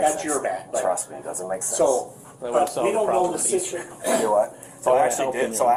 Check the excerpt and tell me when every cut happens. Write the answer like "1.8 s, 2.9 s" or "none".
none